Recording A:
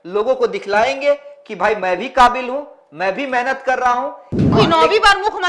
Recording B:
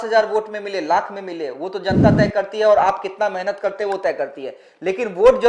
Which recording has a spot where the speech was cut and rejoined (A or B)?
A